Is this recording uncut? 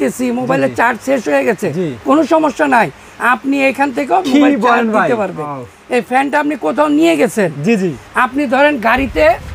no; 1 cut; at 5.5 s

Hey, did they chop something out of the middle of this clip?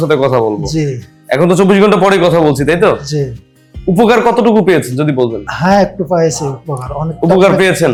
no; 0 cuts

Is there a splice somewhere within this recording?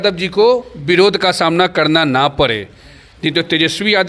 no; 0 cuts

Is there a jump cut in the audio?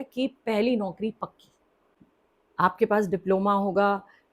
no; 0 cuts

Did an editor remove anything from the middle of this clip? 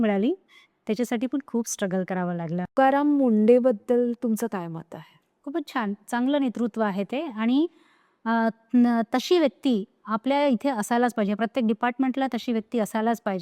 yes; 1 cut; at 2.7 s

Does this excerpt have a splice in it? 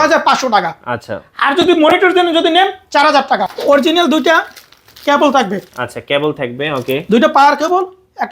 yes; 1 cut; at 3.5 s

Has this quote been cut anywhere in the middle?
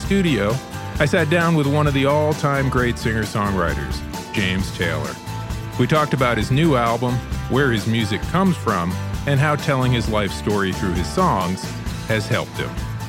no; 0 cuts

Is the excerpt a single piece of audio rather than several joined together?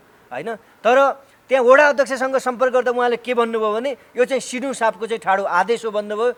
yes; 0 cuts

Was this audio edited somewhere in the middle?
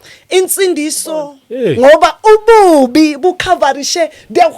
yes; 1 cut; at 1.4 s

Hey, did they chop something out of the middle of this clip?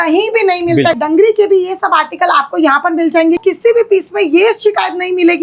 yes; 2 cuts; at 1.0 s, 3.4 s

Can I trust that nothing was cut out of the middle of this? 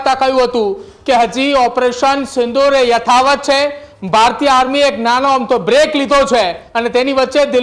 no; 1 cut; at 6.6 s

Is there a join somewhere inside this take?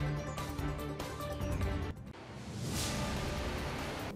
no; 0 cuts

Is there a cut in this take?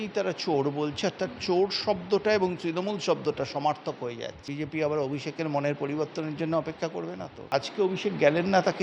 yes; 2 cuts; at 4.5 s, 7.5 s

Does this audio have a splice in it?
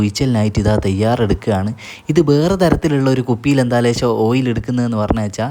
no; 0 cuts

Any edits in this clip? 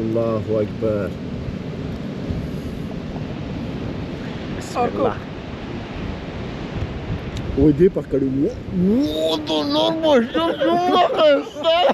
no; 0 cuts

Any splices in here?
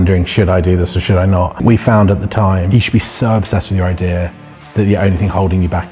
yes; 2 cuts; at 1.6 s, 2.6 s

